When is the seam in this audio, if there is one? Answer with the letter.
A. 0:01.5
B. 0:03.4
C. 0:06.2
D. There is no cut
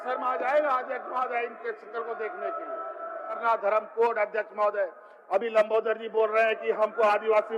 B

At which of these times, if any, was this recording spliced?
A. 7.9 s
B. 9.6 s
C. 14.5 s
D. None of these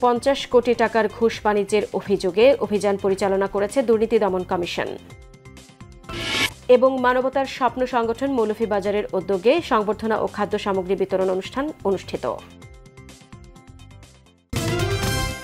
C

